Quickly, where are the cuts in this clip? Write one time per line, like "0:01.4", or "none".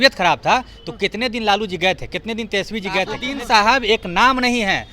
0:03.2